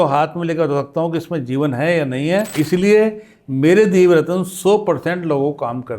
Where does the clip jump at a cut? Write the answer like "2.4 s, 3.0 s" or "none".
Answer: 2.5 s